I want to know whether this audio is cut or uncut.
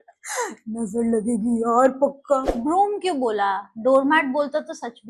cut